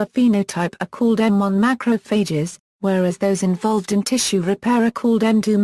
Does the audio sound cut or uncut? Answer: cut